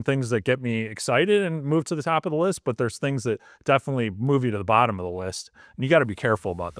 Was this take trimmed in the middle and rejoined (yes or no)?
no